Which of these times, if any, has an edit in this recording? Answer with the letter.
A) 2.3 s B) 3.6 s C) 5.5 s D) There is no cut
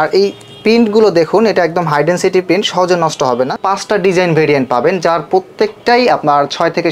B